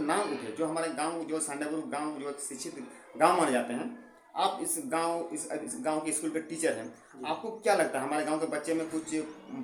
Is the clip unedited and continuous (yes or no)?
yes